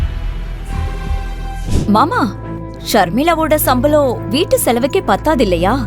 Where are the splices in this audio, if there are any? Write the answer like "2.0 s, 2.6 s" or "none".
1.7 s